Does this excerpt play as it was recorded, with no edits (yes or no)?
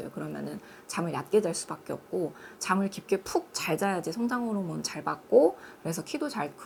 yes